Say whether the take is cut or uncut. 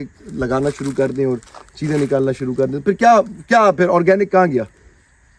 uncut